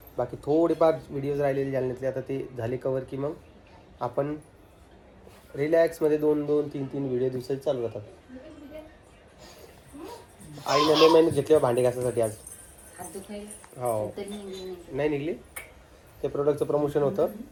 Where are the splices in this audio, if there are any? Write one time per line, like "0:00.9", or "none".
none